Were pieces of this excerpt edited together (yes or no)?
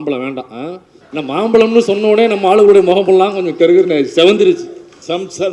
yes